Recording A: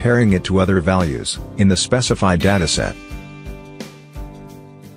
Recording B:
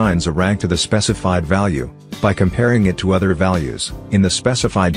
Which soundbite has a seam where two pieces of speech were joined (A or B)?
A